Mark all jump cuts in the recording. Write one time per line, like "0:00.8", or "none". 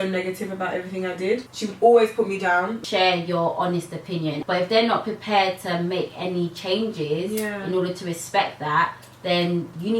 0:02.8
0:04.4